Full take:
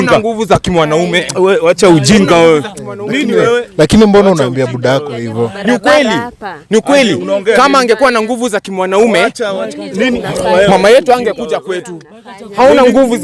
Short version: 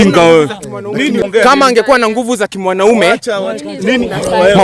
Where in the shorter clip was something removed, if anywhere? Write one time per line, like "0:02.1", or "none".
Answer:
0:01.2